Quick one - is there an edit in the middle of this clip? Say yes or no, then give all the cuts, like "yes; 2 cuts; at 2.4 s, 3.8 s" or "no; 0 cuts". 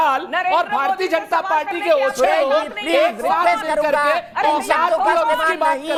no; 0 cuts